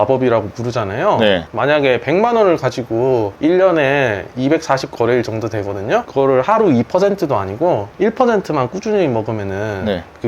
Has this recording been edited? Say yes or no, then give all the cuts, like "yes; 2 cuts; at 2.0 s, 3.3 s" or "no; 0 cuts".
no; 0 cuts